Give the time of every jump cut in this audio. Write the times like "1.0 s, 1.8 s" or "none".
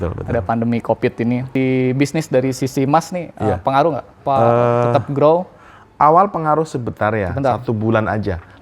1.5 s, 4.1 s